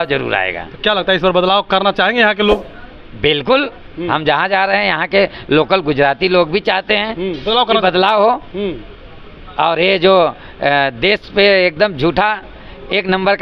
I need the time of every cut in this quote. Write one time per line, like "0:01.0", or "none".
none